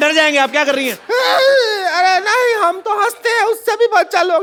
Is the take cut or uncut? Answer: uncut